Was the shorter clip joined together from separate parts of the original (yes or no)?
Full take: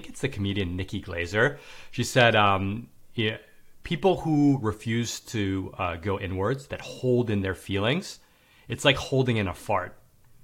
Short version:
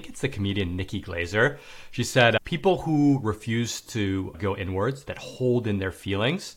yes